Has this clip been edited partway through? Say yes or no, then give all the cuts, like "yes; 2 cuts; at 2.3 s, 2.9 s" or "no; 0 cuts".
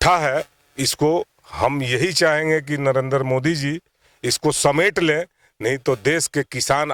no; 0 cuts